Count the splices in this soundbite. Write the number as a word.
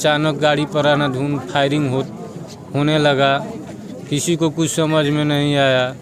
zero